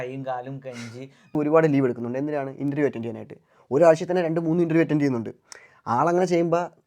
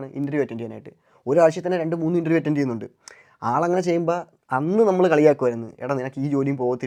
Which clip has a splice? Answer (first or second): first